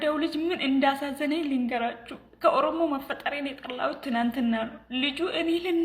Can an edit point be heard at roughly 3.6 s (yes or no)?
no